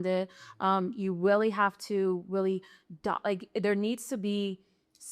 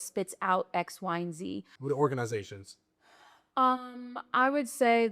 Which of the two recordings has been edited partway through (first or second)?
second